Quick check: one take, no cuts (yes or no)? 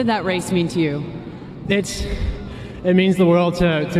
yes